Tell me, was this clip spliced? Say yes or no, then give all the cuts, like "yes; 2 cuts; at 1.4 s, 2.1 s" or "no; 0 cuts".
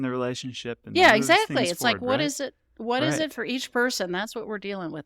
no; 0 cuts